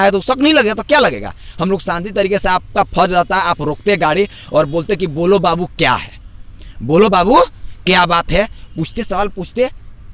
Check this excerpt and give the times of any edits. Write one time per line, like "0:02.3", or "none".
none